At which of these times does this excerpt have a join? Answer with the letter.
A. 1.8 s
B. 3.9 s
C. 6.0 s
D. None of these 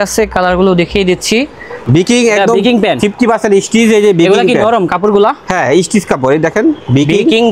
A